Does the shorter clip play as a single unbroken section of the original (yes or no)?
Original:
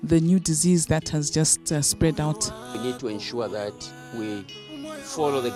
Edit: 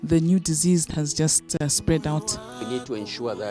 no